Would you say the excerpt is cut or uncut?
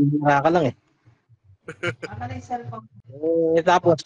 cut